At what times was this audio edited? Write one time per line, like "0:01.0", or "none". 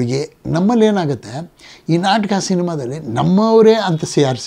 none